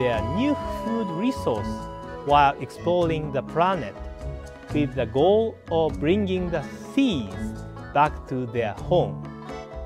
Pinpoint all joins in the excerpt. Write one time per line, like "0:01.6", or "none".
none